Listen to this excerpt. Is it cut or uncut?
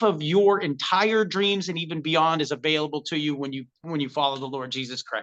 uncut